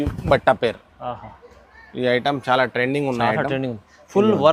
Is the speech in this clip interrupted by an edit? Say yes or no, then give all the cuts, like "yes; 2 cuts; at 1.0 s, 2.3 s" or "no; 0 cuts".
no; 0 cuts